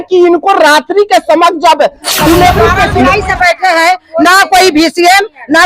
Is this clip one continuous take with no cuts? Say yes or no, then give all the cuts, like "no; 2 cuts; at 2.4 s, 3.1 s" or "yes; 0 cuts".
no; 1 cut; at 2.8 s